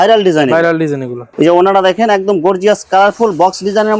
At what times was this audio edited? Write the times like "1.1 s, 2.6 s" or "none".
1.3 s